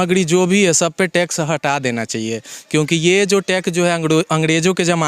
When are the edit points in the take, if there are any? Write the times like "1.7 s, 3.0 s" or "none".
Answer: none